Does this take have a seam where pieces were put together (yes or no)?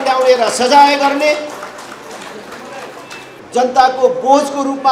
yes